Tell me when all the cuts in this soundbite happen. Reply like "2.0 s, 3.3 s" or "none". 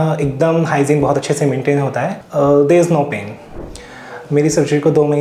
2.2 s